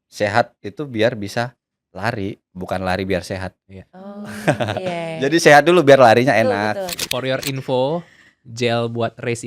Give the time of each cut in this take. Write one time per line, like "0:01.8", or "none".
0:07.0